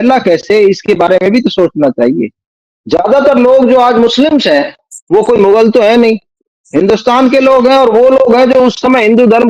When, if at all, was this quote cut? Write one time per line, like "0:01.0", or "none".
none